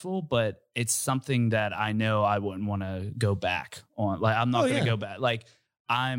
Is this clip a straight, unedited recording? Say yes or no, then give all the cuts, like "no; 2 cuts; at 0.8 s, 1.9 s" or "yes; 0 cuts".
yes; 0 cuts